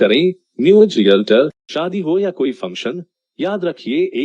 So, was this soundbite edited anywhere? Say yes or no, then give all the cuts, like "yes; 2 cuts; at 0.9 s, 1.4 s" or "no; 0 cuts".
yes; 1 cut; at 1.7 s